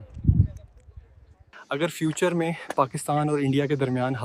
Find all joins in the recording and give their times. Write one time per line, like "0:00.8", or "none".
0:01.5